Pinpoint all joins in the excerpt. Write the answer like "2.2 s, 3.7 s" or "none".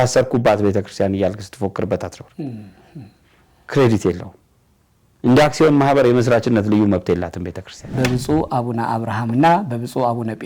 8.0 s